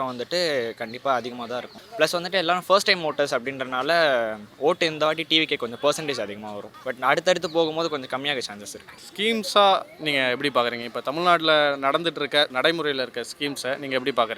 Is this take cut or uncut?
uncut